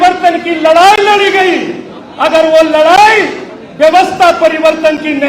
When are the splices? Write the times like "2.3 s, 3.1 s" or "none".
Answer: none